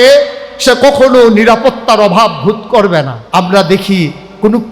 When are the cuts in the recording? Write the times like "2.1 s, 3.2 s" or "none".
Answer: 3.2 s